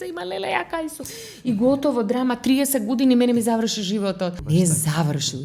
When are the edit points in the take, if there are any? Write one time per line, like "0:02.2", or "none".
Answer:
0:04.3